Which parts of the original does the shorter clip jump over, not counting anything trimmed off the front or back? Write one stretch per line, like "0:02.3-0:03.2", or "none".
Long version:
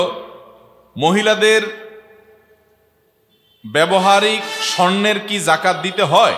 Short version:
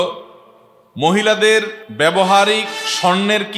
0:01.8-0:03.6